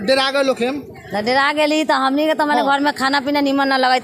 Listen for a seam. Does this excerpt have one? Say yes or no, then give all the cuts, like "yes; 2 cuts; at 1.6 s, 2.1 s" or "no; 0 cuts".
no; 0 cuts